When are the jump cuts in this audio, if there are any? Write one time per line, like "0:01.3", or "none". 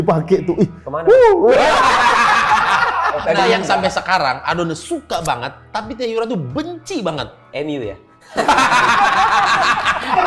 0:03.2